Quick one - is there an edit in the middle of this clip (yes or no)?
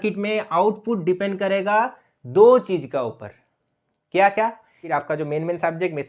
yes